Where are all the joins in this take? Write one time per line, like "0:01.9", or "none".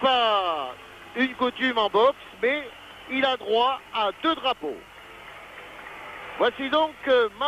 0:06.4